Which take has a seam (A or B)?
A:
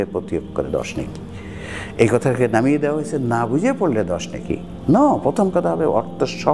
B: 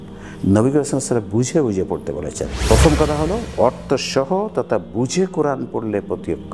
B